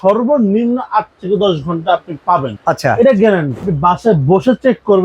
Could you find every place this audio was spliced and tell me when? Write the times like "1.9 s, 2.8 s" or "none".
2.5 s, 3.7 s